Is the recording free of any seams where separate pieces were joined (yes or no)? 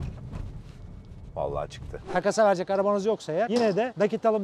no